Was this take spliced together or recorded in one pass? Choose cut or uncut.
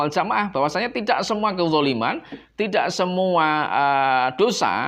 uncut